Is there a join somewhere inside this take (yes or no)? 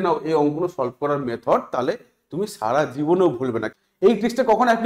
yes